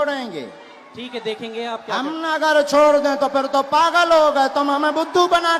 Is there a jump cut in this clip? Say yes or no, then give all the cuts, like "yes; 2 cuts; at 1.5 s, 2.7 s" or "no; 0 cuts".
no; 0 cuts